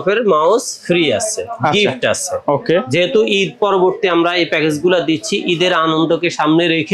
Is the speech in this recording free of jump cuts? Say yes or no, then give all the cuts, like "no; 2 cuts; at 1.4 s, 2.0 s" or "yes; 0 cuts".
yes; 0 cuts